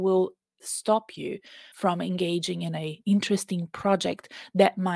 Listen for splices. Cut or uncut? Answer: uncut